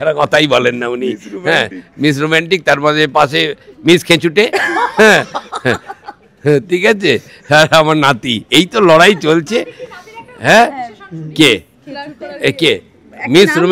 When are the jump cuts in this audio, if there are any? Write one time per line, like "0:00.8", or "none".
none